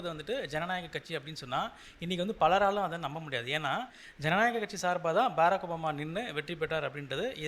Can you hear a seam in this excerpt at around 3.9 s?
no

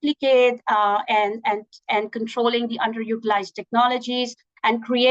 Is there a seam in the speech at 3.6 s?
no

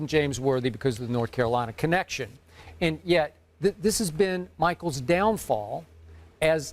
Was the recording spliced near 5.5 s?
no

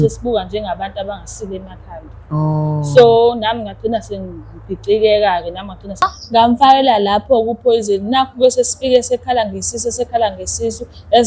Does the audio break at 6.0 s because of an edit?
yes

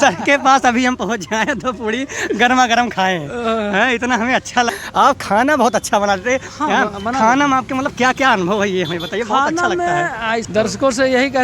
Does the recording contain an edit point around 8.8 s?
no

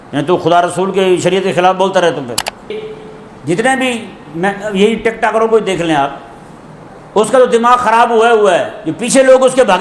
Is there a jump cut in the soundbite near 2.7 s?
yes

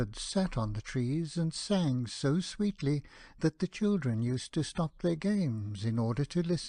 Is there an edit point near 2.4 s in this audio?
yes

